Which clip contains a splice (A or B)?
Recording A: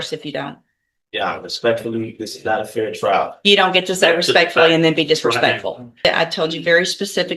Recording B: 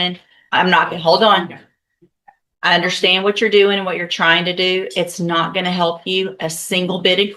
A